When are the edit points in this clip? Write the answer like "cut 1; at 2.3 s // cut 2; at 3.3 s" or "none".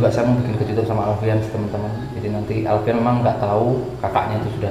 none